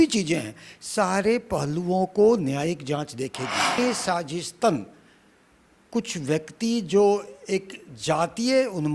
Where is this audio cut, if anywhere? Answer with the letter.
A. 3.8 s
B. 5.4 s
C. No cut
A